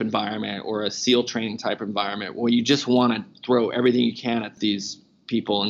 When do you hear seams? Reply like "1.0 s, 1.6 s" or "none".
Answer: 4.5 s